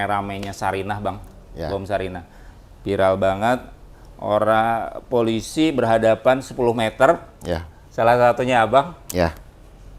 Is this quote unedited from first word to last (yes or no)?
yes